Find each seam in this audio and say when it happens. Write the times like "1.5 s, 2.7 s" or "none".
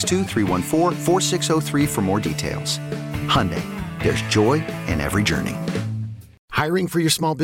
6.3 s